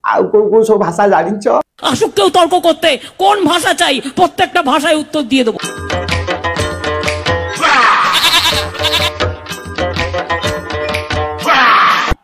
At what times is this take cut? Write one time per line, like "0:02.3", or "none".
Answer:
none